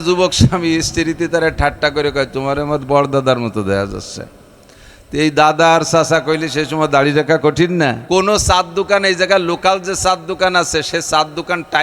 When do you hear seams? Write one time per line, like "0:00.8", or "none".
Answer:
0:08.0

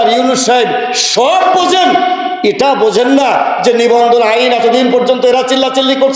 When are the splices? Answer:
none

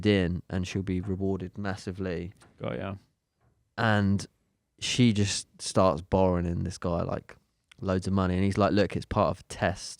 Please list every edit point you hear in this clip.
none

